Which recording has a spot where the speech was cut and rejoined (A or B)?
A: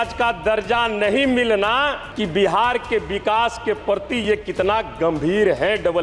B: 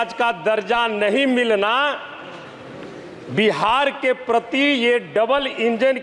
A